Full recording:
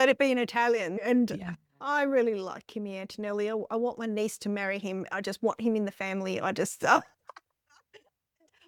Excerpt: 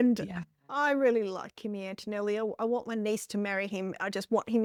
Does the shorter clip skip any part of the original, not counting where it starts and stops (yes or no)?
no